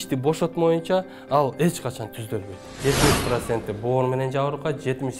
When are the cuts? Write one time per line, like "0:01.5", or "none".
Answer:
0:02.8